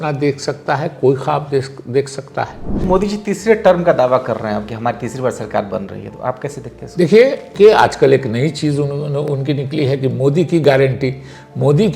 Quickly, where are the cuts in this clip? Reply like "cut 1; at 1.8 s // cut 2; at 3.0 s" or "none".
cut 1; at 2.7 s // cut 2; at 7.5 s